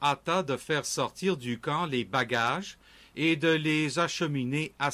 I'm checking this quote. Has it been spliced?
yes; 1 cut; at 3.2 s

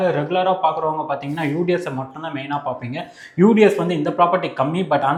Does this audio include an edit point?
no; 0 cuts

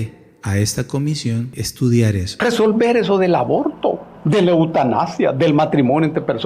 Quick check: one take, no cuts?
no; 3 cuts; at 1.6 s, 2.3 s, 4.4 s

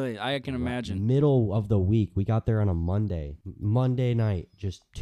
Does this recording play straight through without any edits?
yes; 0 cuts

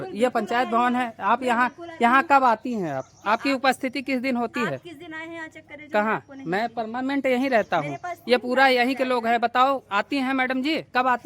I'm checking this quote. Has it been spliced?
no; 0 cuts

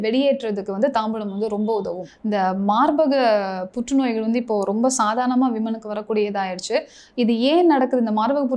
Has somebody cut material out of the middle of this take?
yes; 1 cut; at 2.0 s

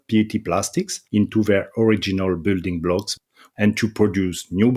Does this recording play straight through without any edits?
no; 2 cuts; at 1.0 s, 3.2 s

